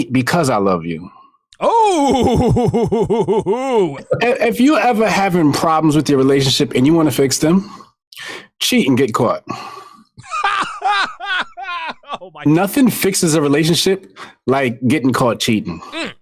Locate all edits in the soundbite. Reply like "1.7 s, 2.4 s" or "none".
4.0 s, 12.4 s